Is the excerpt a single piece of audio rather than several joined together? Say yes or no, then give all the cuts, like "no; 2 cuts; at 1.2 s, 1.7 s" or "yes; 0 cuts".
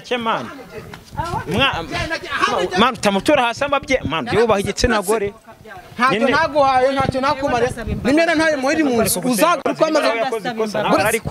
yes; 0 cuts